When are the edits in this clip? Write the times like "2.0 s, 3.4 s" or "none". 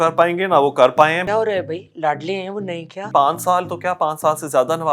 1.2 s, 3.1 s